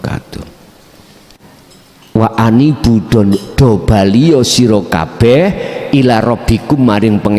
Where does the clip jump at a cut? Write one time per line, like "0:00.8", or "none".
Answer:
0:01.3